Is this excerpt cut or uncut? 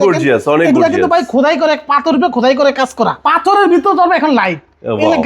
cut